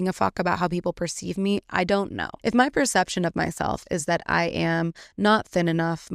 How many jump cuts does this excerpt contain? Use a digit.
1